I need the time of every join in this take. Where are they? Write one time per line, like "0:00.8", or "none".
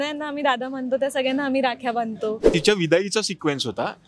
0:02.5